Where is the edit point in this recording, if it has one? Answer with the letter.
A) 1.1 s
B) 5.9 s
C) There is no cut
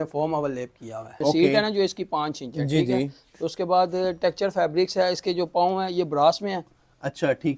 A